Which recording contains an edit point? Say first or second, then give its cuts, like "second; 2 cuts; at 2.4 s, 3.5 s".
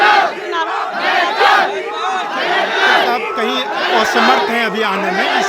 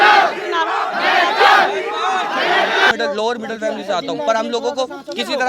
second; 1 cut; at 2.9 s